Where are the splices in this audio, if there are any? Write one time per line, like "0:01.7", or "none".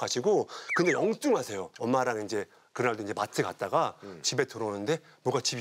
0:01.7